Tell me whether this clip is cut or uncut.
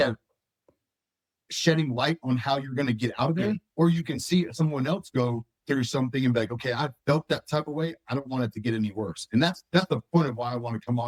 uncut